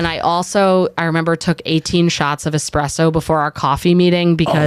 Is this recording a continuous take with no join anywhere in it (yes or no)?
yes